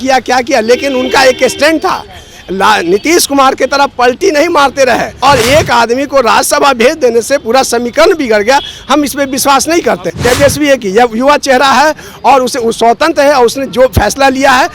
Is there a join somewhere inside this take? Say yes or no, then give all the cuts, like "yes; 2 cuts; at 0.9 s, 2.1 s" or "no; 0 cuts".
yes; 2 cuts; at 5.1 s, 10.1 s